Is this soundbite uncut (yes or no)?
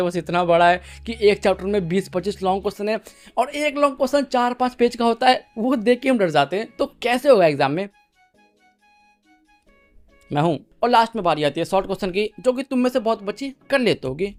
yes